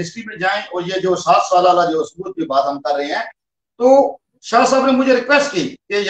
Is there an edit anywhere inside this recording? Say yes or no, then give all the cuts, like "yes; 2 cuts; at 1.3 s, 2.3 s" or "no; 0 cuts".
no; 0 cuts